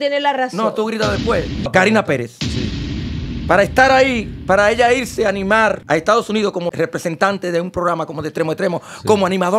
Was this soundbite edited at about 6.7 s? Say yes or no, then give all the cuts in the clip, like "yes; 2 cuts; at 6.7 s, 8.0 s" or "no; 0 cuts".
yes; 3 cuts; at 1.6 s, 5.8 s, 6.7 s